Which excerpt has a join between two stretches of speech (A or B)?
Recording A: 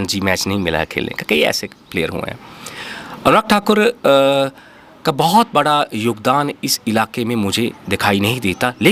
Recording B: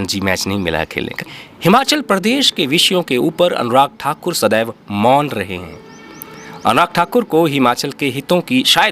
B